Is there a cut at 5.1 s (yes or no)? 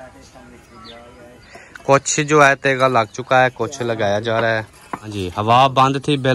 yes